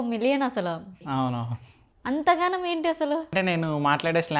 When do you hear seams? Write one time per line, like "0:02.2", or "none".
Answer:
0:01.0
0:03.3